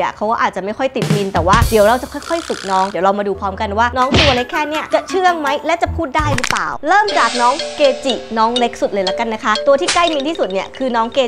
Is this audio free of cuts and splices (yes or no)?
yes